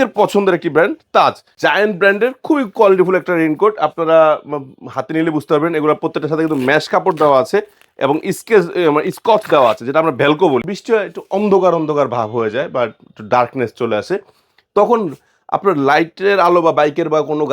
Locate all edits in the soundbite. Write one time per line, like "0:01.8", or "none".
0:01.5
0:10.7